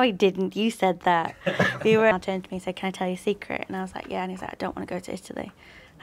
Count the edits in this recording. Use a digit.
1